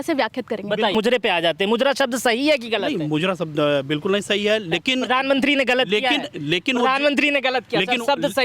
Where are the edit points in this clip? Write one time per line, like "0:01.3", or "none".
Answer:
0:00.9